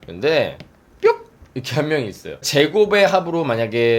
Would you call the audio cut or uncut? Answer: cut